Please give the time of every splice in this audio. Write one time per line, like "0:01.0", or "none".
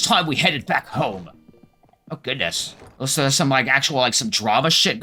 none